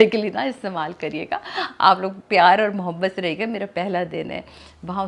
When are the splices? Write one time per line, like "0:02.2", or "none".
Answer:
none